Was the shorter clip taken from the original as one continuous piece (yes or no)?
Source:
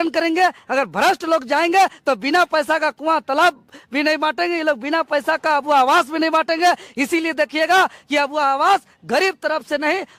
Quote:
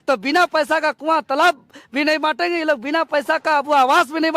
yes